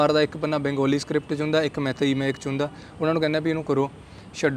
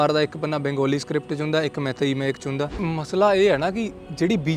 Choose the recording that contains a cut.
second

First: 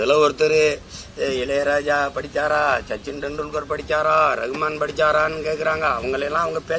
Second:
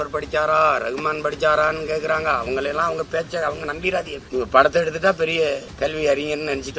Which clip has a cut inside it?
second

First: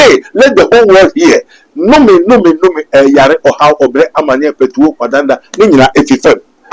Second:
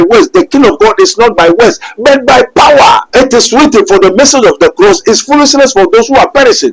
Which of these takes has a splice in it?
second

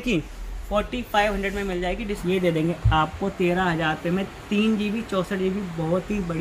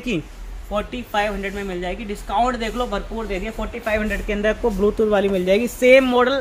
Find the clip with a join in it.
first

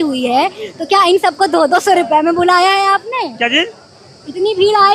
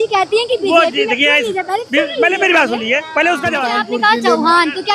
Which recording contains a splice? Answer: second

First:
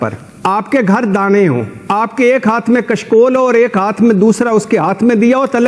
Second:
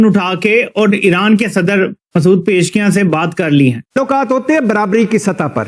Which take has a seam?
second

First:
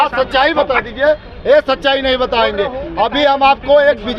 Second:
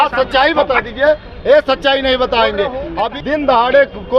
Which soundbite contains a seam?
second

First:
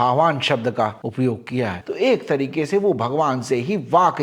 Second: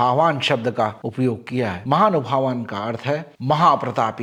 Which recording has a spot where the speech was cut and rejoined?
first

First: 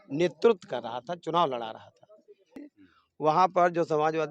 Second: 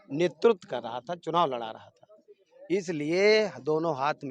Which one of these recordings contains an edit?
first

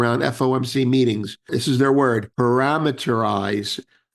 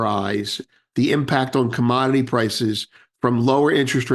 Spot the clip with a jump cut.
first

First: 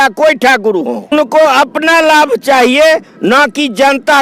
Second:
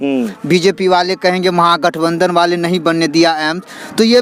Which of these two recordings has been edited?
first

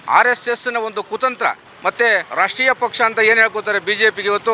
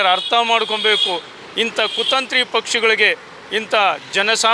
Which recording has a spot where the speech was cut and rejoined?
first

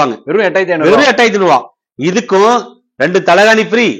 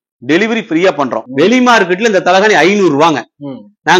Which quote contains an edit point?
second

